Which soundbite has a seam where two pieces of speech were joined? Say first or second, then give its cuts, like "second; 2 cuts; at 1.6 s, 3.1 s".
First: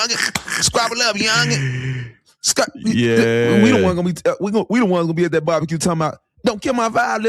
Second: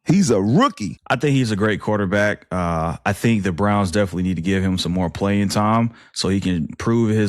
second; 1 cut; at 0.9 s